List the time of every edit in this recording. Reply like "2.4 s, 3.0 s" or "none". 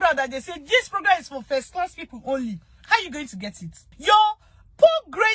3.9 s